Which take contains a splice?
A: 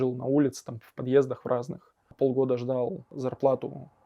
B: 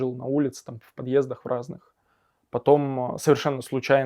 A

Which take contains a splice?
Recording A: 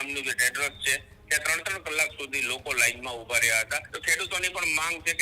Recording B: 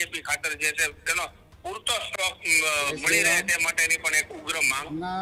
A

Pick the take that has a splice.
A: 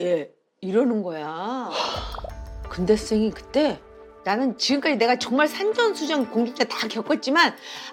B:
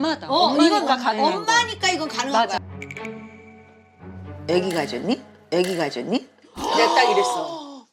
B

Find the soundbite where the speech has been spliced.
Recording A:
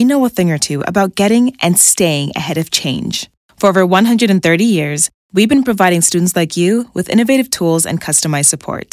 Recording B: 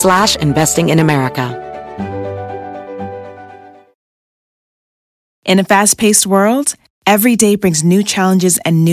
B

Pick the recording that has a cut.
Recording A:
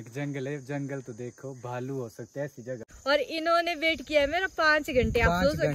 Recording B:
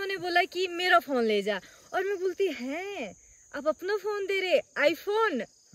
A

